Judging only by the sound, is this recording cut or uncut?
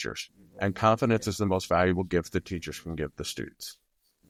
uncut